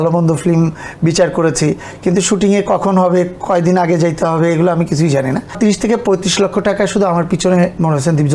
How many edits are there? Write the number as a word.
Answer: one